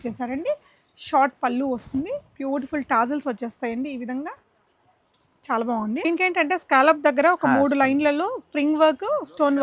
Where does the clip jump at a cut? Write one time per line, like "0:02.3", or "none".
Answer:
0:06.0